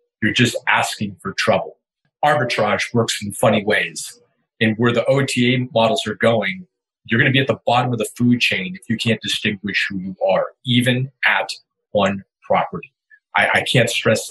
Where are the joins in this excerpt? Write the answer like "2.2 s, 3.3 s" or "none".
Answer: 2.0 s